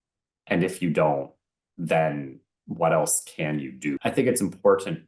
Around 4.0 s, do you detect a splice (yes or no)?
yes